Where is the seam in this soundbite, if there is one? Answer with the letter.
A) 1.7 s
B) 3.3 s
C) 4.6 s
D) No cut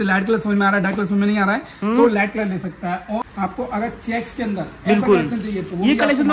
B